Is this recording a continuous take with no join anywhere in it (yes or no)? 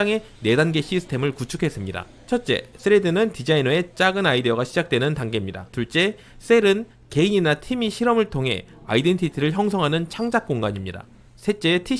yes